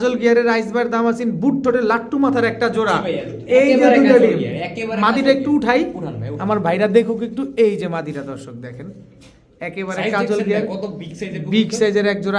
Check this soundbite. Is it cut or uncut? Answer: uncut